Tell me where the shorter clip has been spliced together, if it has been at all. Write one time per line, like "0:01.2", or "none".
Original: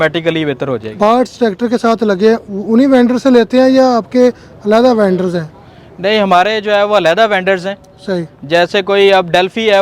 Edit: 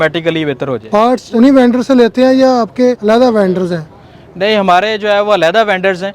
0:01.0
0:03.0